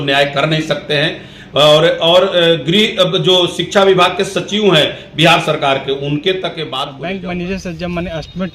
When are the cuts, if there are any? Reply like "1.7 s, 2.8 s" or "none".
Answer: 6.9 s